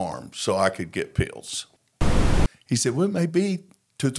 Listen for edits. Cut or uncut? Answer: cut